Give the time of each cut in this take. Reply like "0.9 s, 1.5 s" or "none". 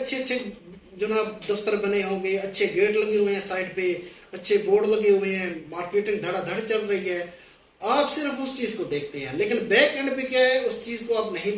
none